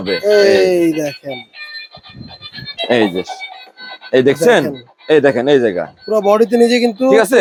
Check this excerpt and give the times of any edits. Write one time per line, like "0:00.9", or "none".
none